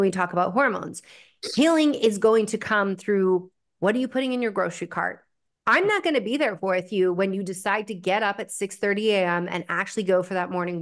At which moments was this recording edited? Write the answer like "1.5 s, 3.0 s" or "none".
none